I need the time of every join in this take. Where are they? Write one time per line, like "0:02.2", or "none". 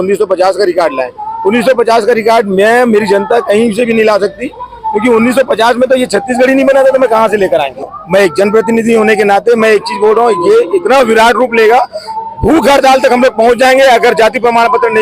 0:07.9